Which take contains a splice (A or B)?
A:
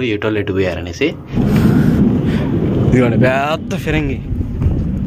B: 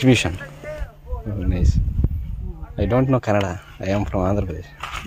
A